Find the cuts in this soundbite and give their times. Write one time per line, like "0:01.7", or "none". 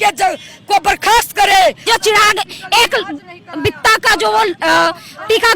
0:01.8